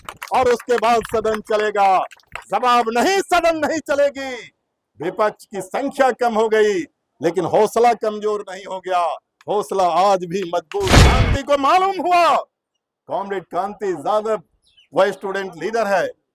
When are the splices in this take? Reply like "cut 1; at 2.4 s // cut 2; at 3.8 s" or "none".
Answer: cut 1; at 11.2 s